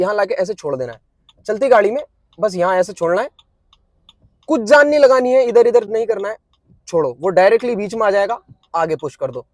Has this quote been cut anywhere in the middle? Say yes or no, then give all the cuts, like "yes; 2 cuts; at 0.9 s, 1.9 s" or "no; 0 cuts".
no; 0 cuts